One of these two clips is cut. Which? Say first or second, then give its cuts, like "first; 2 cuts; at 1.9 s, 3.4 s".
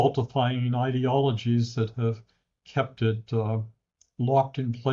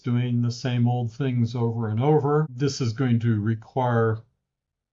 second; 1 cut; at 2.5 s